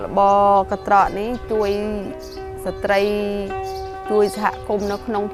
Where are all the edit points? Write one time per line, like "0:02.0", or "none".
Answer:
none